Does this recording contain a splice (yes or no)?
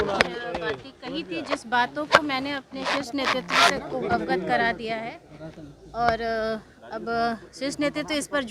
no